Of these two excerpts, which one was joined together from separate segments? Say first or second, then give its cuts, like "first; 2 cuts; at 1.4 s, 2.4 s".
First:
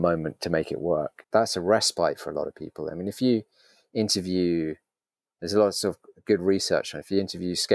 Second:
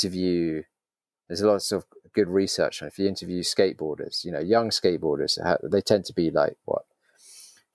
first; 1 cut; at 1.2 s